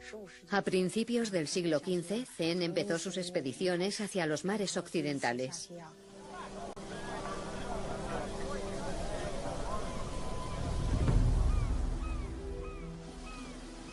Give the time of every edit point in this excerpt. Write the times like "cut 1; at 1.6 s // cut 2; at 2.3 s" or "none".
cut 1; at 7.8 s